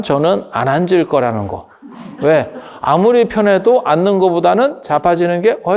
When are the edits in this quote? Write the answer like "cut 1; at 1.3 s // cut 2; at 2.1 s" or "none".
none